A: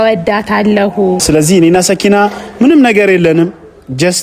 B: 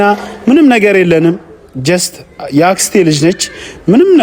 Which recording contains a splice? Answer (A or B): A